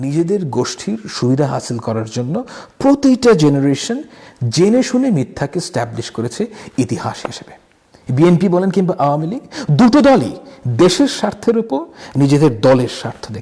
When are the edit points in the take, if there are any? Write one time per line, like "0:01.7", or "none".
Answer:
none